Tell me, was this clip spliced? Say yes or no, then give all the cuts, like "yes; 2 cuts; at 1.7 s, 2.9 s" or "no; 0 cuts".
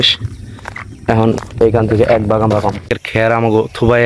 yes; 1 cut; at 3.0 s